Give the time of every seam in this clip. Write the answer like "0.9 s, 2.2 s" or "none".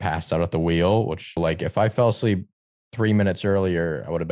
1.4 s